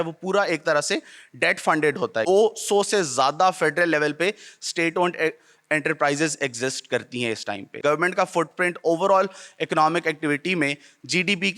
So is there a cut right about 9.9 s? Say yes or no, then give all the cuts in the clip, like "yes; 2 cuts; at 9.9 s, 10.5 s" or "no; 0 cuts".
no; 2 cuts; at 2.3 s, 7.8 s